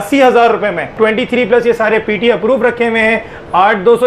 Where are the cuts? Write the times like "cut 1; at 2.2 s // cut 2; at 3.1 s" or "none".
cut 1; at 0.9 s